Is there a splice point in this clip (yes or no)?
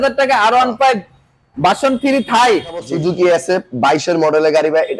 yes